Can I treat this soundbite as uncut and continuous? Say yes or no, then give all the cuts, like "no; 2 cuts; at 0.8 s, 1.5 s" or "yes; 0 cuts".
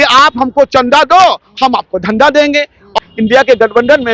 no; 1 cut; at 3.0 s